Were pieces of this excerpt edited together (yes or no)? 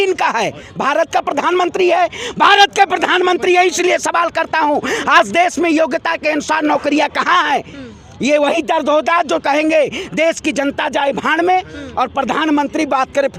no